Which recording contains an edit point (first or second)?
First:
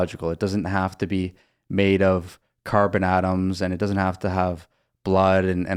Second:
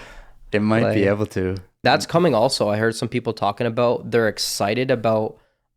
second